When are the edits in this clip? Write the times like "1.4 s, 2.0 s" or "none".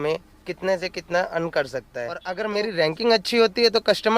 2.3 s